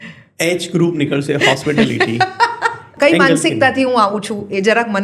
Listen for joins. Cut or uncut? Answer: cut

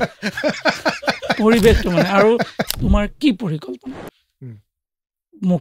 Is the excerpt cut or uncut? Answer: cut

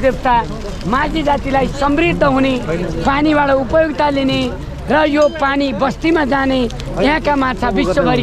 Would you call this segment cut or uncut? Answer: uncut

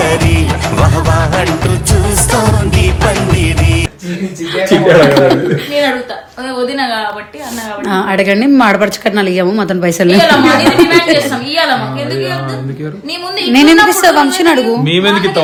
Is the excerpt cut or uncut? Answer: uncut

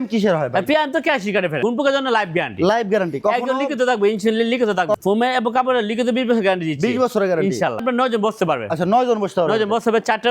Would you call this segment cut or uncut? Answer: cut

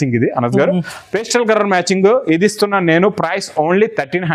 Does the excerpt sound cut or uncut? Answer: uncut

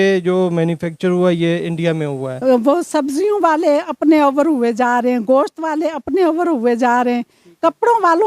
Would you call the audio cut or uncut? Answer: cut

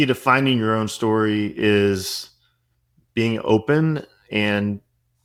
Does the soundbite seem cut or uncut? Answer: uncut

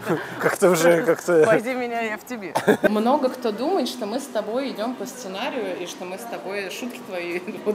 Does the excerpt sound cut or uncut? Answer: cut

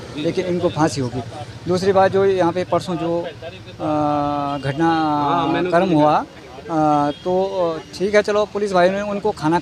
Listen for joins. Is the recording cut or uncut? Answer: uncut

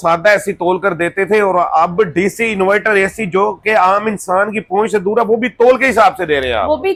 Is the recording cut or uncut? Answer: uncut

